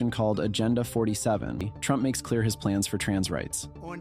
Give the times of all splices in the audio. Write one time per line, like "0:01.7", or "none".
0:01.6